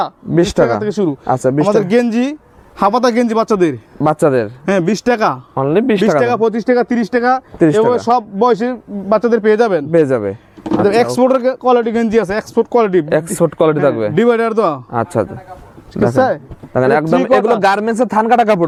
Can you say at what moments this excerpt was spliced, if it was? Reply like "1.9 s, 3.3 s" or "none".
none